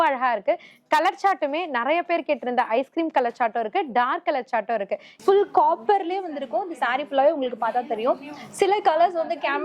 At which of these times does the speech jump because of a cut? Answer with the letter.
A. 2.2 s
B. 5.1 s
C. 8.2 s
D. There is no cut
B